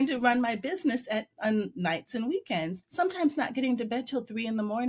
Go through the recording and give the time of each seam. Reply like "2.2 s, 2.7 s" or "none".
2.8 s